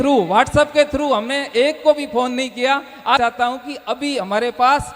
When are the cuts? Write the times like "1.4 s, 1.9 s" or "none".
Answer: 3.2 s